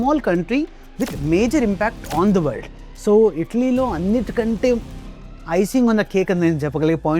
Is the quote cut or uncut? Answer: cut